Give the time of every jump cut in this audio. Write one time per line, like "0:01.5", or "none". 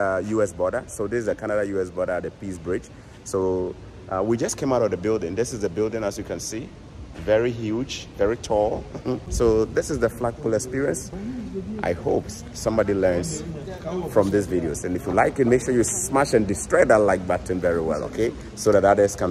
0:09.3